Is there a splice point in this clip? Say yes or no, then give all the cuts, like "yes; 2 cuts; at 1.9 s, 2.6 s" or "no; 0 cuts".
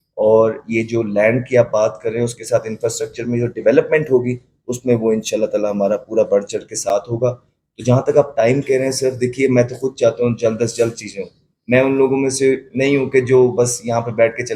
no; 0 cuts